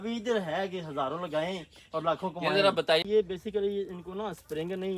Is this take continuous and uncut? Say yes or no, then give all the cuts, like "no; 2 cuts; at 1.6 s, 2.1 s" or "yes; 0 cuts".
no; 1 cut; at 3.0 s